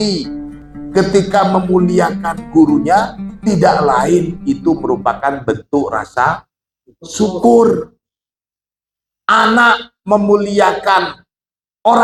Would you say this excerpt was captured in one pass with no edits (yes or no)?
yes